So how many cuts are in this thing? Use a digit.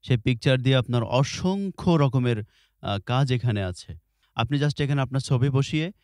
1